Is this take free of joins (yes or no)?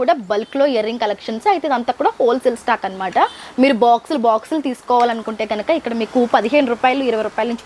yes